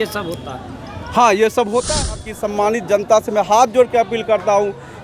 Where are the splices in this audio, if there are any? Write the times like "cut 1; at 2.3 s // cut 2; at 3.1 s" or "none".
cut 1; at 2.2 s